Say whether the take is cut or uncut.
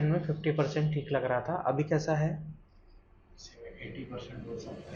uncut